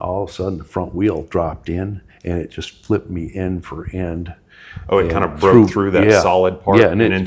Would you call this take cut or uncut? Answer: uncut